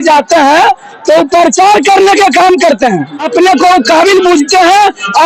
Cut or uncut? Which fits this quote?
cut